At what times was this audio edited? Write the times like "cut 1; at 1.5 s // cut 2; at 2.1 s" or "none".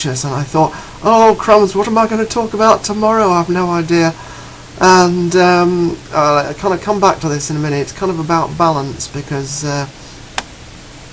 cut 1; at 9.5 s